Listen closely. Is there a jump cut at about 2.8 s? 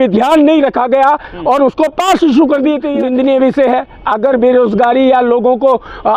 yes; 1 cut; at 2.8 s

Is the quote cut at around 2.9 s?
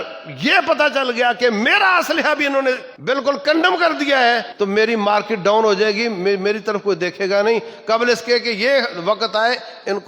yes; 2 cuts; at 2.9 s, 4.5 s

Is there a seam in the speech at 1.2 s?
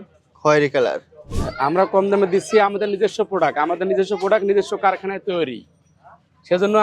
yes; 1 cut; at 1.2 s

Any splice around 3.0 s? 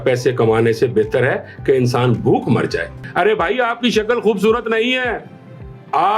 yes; 1 cut; at 3.0 s

